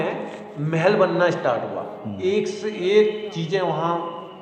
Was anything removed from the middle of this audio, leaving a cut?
no; 0 cuts

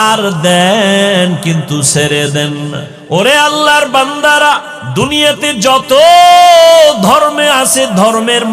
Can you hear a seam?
yes; 2 cuts; at 2.9 s, 4.8 s

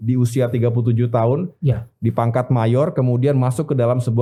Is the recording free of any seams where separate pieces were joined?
yes; 0 cuts

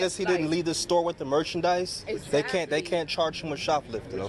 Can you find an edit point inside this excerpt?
no; 0 cuts

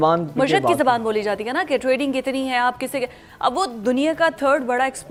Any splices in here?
no; 0 cuts

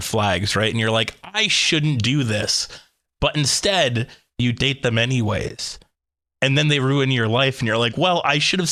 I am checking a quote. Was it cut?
no; 0 cuts

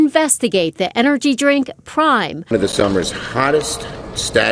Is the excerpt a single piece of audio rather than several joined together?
no; 1 cut; at 2.5 s

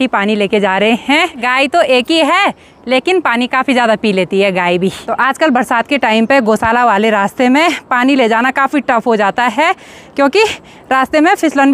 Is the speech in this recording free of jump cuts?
yes; 0 cuts

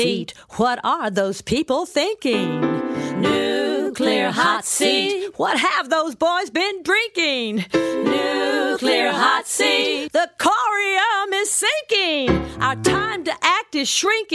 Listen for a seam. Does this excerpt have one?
no; 0 cuts

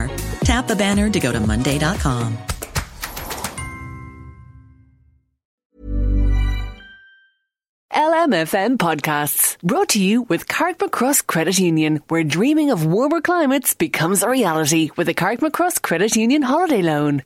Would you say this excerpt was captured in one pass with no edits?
no; 2 cuts; at 5.5 s, 7.8 s

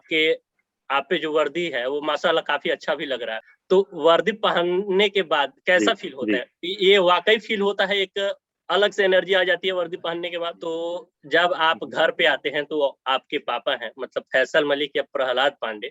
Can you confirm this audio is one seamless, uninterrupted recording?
no; 1 cut; at 10.6 s

